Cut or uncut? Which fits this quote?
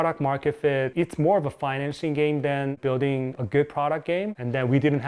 cut